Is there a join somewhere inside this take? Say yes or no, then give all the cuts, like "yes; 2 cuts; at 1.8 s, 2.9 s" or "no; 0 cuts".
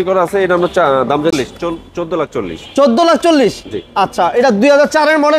yes; 1 cut; at 1.3 s